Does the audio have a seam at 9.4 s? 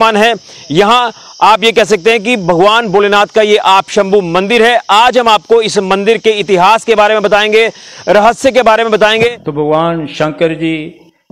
yes; 1 cut; at 9.4 s

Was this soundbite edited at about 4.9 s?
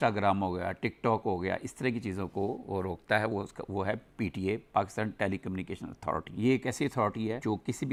no; 0 cuts

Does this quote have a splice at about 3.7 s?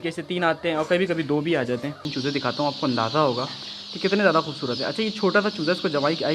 no; 1 cut; at 2.1 s

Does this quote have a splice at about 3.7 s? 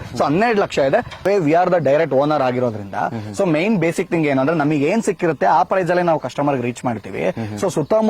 no; 1 cut; at 1.2 s

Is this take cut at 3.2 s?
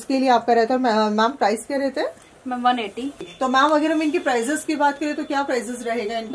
yes; 1 cut; at 3.2 s

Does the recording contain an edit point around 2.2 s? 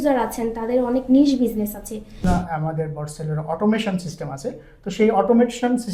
yes; 1 cut; at 2.2 s

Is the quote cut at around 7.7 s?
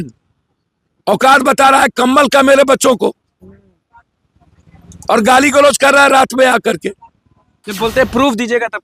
yes; 1 cut; at 7.7 s

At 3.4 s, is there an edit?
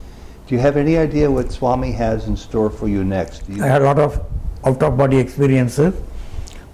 yes; 1 cut; at 3.4 s

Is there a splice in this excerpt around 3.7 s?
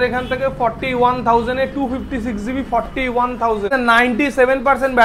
yes; 1 cut; at 3.7 s

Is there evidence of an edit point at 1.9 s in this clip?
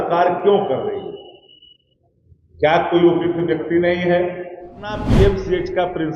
no; 1 cut; at 5.1 s

